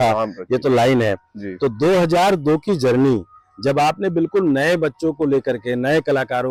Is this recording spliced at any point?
no; 0 cuts

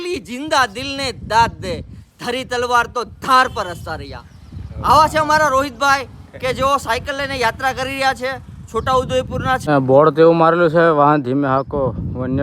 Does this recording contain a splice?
yes; 1 cut; at 9.6 s

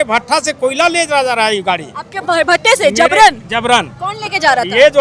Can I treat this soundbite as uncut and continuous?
yes; 0 cuts

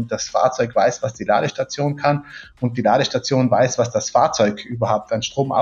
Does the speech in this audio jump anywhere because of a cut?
no; 0 cuts

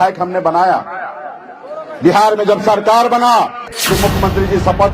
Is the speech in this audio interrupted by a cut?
yes; 1 cut; at 3.7 s

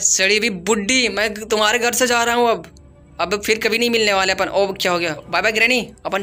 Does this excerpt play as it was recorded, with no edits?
no; 1 cut; at 5.2 s

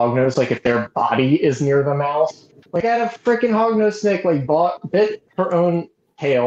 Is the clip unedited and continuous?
yes; 0 cuts

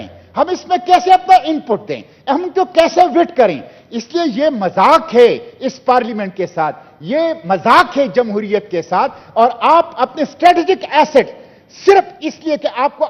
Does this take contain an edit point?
no; 0 cuts

